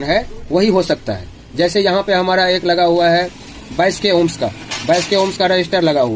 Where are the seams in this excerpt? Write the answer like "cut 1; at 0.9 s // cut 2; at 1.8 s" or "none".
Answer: none